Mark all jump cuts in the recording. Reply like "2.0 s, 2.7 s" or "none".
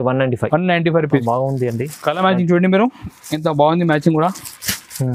1.1 s